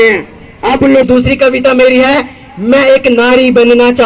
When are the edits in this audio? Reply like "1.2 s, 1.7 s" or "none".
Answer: 1.0 s